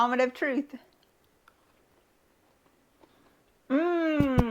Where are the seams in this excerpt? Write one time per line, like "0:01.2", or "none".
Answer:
0:03.1